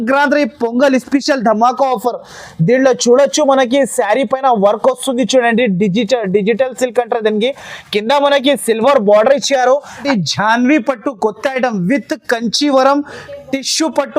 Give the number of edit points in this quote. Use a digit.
1